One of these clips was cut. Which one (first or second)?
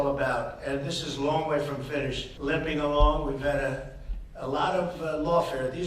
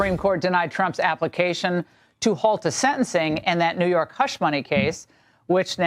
first